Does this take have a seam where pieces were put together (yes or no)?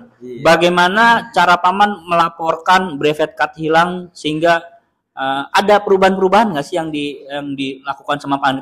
no